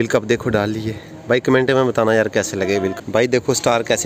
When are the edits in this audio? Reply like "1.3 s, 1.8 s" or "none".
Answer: 2.9 s